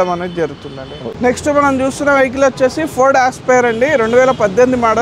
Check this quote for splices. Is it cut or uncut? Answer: cut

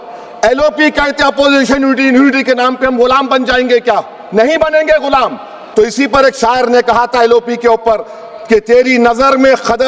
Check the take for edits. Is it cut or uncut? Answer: cut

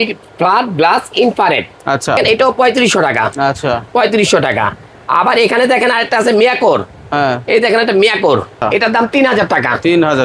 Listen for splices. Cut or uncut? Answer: cut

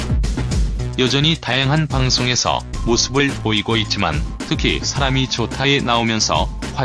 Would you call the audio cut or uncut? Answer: uncut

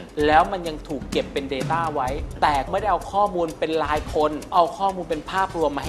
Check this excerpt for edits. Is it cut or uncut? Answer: cut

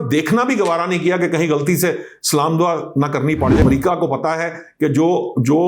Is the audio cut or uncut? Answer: cut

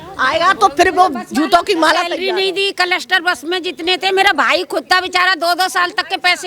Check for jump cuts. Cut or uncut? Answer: uncut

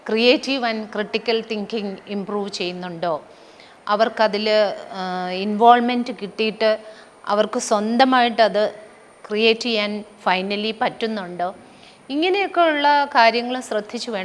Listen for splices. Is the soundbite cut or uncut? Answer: uncut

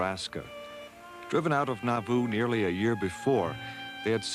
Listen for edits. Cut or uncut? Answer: cut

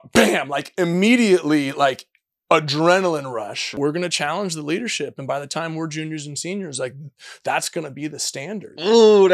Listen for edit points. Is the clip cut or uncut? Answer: cut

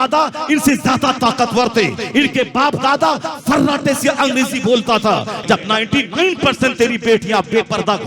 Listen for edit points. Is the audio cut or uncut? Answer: cut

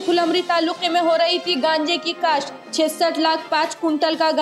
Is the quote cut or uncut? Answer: uncut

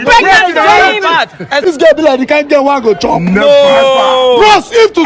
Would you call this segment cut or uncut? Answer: cut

